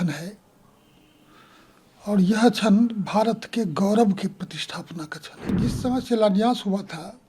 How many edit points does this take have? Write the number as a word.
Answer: one